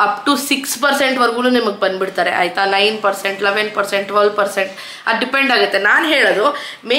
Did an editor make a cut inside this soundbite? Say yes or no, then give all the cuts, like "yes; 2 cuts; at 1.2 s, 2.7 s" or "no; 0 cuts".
no; 0 cuts